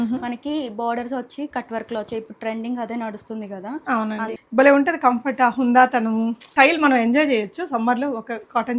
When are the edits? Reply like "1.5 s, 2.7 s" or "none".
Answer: 4.3 s, 6.5 s